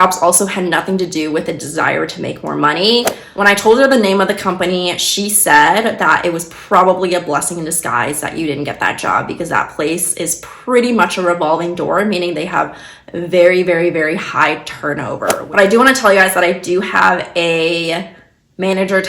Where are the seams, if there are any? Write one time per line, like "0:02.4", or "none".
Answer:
0:03.2
0:15.4